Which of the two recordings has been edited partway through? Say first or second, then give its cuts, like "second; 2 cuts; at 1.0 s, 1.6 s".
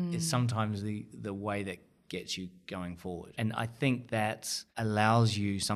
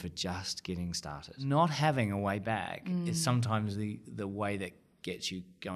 second; 1 cut; at 1.4 s